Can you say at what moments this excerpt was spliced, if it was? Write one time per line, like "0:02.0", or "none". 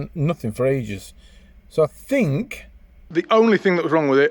0:03.0